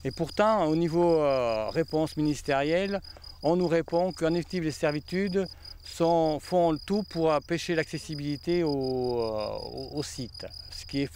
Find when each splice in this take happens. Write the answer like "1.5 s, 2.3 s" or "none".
none